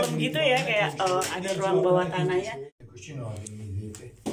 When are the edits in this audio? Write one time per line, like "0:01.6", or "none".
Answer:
0:02.7